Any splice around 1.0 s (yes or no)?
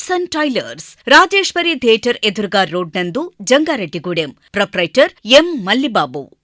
no